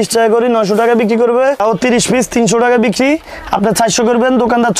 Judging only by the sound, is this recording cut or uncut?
cut